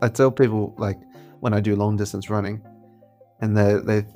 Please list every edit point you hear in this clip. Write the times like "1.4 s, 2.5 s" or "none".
none